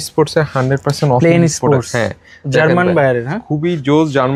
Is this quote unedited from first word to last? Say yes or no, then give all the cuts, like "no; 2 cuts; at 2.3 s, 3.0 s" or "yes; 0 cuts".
yes; 0 cuts